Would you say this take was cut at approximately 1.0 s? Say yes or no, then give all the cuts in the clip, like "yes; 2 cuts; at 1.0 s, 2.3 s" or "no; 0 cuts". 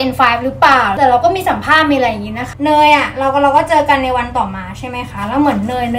yes; 2 cuts; at 1.0 s, 2.5 s